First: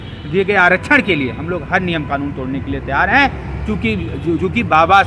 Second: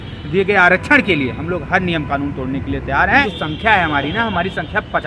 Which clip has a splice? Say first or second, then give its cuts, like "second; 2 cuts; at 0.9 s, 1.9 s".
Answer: second; 1 cut; at 3.2 s